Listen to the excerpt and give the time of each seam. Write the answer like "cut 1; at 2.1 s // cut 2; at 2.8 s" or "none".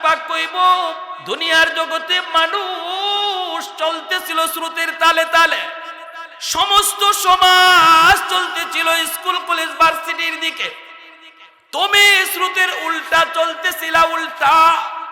cut 1; at 1.1 s